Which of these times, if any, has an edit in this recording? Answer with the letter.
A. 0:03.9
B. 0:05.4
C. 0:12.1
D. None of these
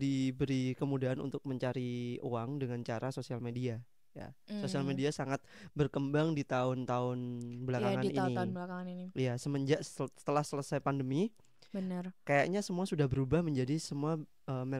D